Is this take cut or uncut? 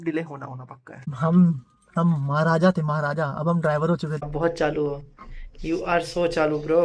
cut